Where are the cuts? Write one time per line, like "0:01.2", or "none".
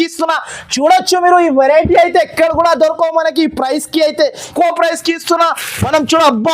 0:04.4

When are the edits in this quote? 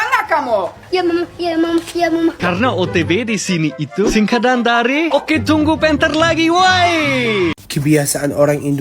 0:02.4
0:07.5

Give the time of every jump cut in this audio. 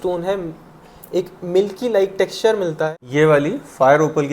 0:03.0

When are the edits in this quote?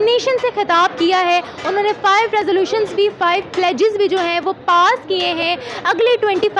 none

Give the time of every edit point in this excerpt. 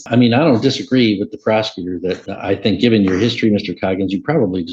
0:02.3

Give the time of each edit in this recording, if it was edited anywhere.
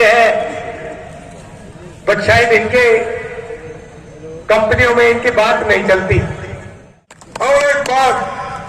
0:07.5

